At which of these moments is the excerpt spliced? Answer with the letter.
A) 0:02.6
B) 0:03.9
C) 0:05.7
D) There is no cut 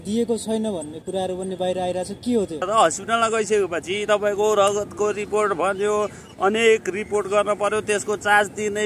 A